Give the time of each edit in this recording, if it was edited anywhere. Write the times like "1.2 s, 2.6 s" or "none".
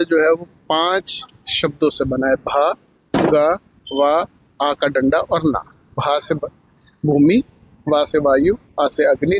none